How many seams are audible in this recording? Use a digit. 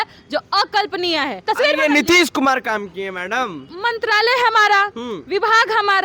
2